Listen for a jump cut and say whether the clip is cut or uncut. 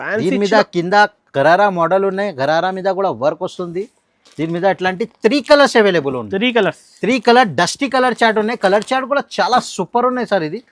uncut